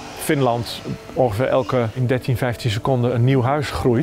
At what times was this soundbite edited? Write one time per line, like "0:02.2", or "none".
0:02.0